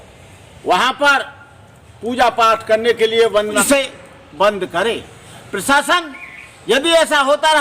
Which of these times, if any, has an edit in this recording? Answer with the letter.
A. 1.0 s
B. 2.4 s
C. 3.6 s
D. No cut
C